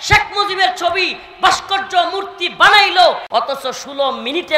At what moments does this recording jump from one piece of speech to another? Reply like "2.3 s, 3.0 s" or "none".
3.2 s